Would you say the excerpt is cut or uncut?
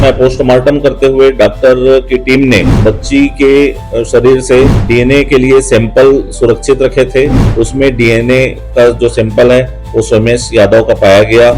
cut